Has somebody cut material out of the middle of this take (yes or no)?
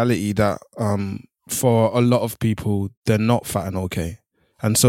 no